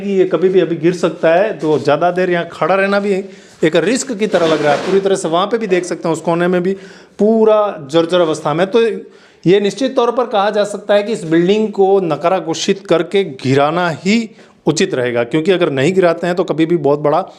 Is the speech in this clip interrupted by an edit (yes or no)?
no